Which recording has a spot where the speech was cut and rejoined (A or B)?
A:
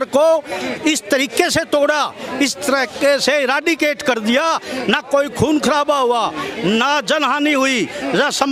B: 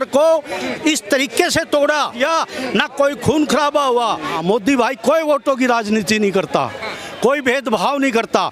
B